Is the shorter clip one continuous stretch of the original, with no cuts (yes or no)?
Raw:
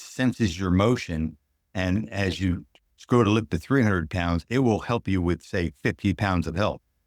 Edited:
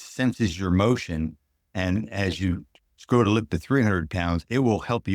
yes